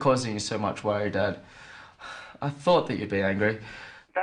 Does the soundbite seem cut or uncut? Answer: cut